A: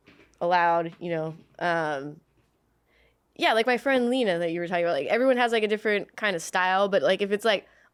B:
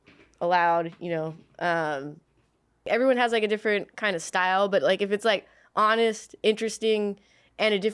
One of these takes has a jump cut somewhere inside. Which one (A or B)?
B